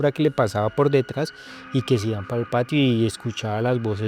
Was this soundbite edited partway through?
no; 0 cuts

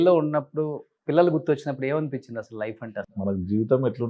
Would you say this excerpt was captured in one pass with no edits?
no; 1 cut; at 2.9 s

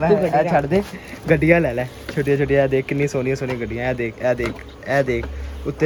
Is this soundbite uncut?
yes; 0 cuts

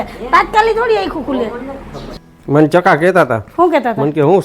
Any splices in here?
yes; 1 cut; at 2.1 s

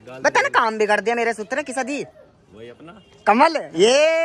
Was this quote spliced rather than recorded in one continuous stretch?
no; 0 cuts

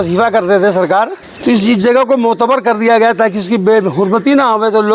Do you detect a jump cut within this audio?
yes; 1 cut; at 1.2 s

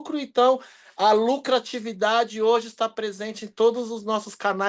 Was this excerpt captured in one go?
yes; 0 cuts

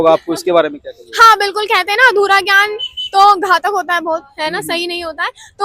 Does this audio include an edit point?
no; 0 cuts

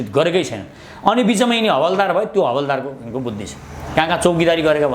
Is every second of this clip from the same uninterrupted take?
yes; 0 cuts

